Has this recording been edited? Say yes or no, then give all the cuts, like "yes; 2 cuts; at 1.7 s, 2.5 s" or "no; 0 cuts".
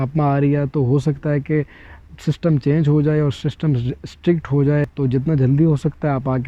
yes; 1 cut; at 4.9 s